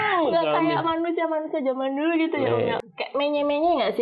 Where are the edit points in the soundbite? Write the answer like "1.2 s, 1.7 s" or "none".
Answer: 2.8 s